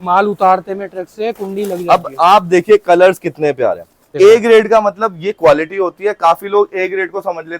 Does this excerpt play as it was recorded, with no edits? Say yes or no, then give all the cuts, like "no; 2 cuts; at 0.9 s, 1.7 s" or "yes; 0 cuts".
no; 1 cut; at 4.1 s